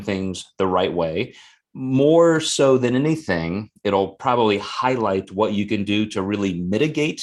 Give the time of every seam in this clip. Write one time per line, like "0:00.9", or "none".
none